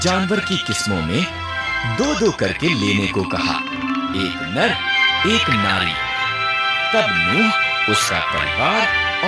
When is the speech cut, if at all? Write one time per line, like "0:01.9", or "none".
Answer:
none